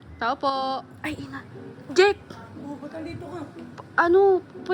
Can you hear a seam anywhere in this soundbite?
yes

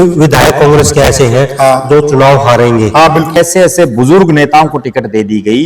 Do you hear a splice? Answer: yes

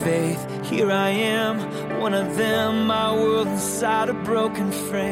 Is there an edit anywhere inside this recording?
no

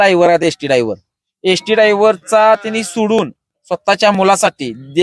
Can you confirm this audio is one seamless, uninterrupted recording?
yes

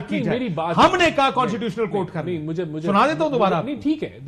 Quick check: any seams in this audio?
no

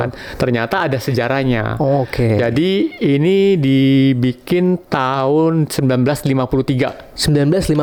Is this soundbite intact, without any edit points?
yes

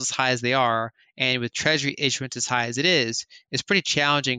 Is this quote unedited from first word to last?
yes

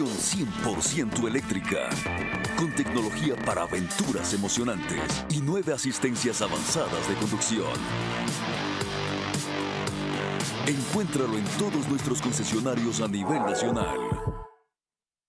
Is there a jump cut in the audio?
no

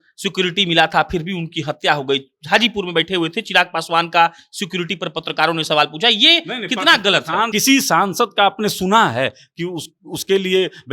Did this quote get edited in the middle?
yes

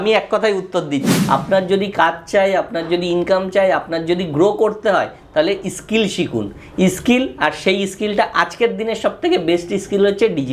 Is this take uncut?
no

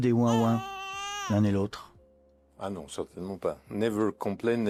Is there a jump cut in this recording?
no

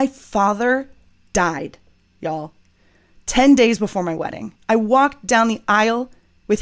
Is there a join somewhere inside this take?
no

